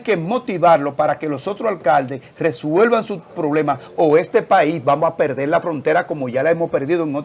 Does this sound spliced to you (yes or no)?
no